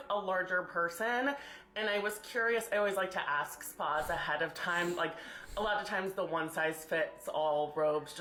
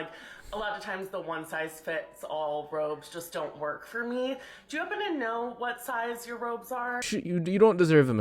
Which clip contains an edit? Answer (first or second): second